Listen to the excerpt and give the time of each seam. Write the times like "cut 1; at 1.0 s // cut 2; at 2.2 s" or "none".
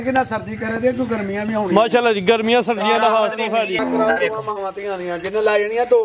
cut 1; at 3.8 s